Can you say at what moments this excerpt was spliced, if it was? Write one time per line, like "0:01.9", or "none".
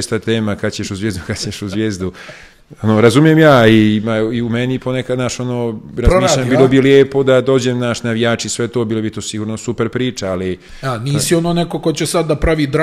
0:10.7